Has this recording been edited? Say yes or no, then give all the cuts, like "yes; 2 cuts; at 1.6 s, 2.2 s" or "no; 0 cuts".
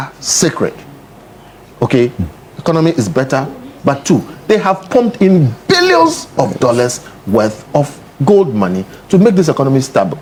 no; 0 cuts